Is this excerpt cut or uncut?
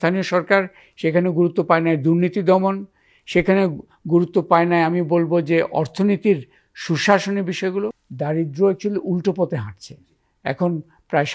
cut